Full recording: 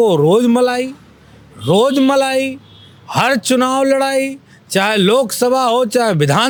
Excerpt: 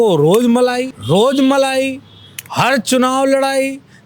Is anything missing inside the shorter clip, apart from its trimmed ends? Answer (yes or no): yes